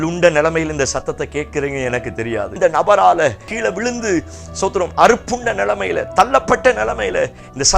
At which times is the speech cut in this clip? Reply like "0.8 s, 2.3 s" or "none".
2.5 s, 3.5 s